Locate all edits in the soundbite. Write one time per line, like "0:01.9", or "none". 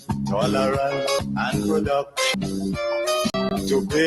0:01.2
0:02.3
0:03.3